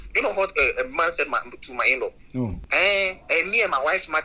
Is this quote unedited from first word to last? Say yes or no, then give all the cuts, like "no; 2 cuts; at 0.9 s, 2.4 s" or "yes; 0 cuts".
no; 1 cut; at 2.6 s